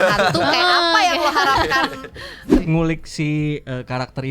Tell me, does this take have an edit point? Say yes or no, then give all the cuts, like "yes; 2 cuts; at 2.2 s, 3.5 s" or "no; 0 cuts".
yes; 1 cut; at 2.6 s